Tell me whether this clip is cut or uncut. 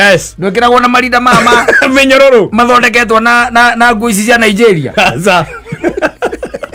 uncut